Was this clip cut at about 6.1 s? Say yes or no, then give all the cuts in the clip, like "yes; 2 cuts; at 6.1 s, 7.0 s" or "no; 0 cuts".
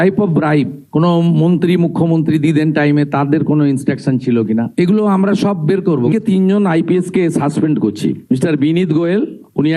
yes; 1 cut; at 6.1 s